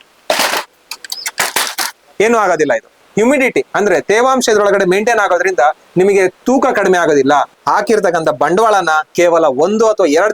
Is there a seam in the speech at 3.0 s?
yes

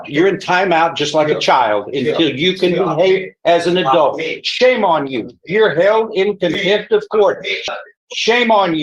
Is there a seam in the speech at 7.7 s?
yes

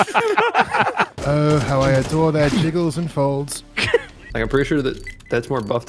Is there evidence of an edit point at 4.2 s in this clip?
yes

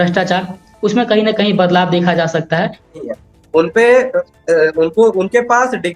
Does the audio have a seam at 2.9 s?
yes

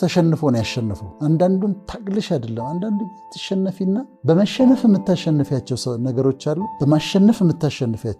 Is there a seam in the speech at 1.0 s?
yes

